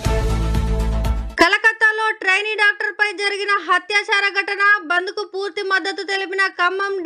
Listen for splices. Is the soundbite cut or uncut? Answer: cut